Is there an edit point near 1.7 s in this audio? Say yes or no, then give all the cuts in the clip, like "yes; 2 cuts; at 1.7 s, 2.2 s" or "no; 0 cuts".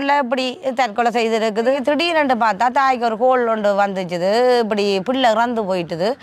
yes; 1 cut; at 1.7 s